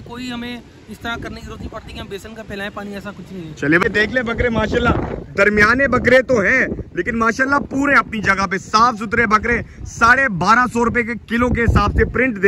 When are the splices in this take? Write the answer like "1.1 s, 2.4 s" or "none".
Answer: 3.8 s